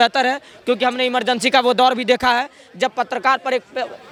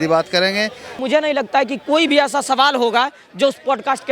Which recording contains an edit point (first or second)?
second